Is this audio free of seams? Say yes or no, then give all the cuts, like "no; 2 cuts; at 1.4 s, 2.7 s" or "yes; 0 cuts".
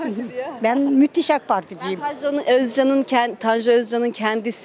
yes; 0 cuts